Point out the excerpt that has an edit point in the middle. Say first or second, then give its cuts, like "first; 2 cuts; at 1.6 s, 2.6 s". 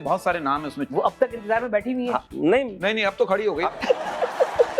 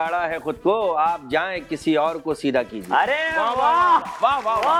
first; 2 cuts; at 0.8 s, 3.7 s